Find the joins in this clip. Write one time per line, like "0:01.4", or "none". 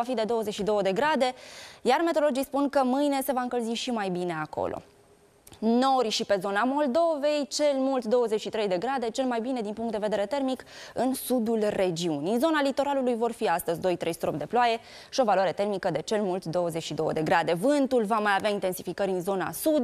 0:12.6

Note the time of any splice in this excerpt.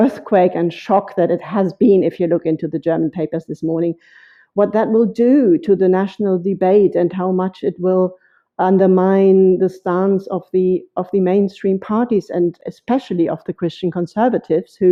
none

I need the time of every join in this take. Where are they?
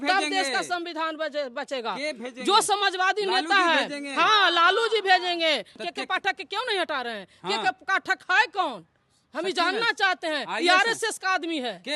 0:05.8

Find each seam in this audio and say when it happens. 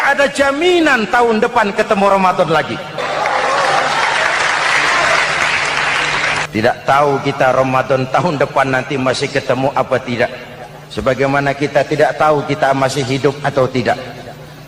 0:03.0
0:06.5

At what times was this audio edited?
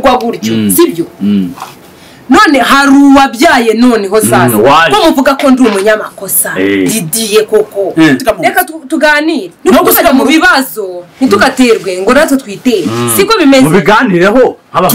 0:08.2

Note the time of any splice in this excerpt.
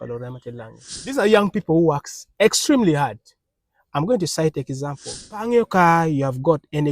0:01.1
0:05.4

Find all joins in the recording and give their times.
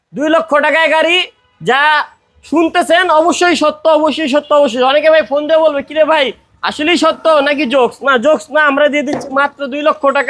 none

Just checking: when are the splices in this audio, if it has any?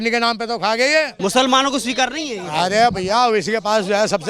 0:01.1

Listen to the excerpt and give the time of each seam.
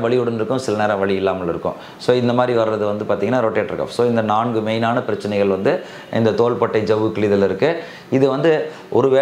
none

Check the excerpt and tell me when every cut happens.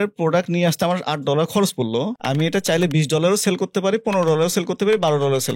0:02.1

